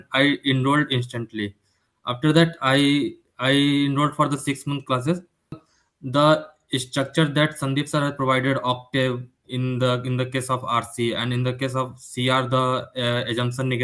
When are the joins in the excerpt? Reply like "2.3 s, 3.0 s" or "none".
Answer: 5.7 s